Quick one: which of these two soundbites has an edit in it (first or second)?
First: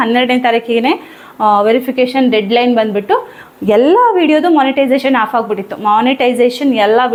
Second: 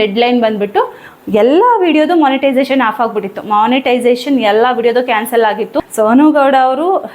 second